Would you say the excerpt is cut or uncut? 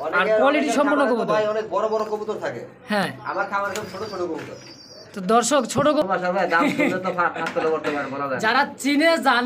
cut